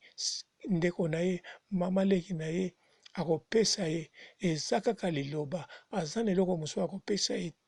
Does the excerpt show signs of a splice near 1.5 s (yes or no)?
no